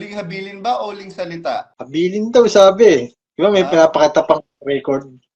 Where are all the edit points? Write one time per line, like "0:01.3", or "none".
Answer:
0:01.8

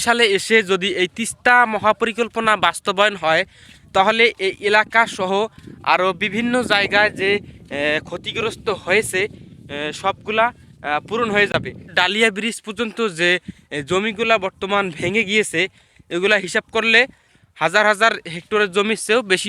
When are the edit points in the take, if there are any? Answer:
none

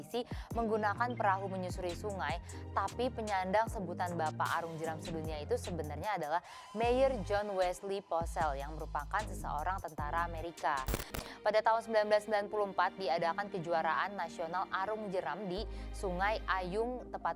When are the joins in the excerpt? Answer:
0:11.1

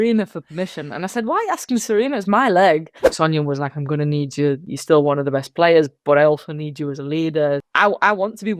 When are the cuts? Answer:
0:03.0
0:04.7
0:07.7

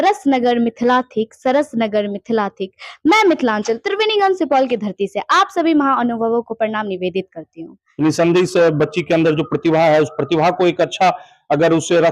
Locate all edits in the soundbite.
0:07.8

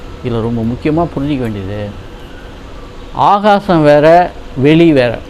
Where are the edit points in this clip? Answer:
0:02.6

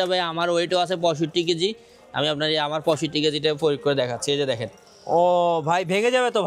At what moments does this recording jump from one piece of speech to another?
none

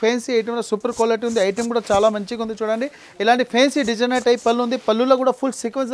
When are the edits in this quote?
none

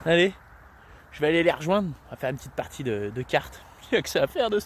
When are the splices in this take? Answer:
none

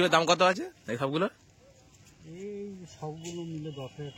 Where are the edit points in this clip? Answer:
none

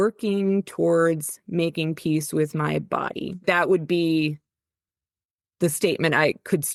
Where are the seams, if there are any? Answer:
none

